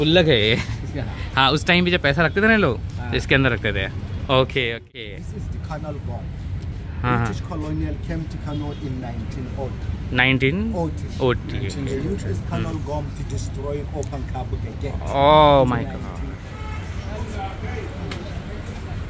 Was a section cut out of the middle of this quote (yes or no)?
no